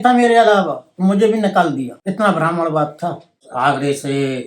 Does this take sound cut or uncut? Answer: cut